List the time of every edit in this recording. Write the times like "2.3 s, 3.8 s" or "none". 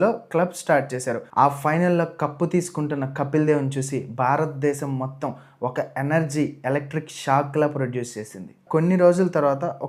1.3 s, 8.6 s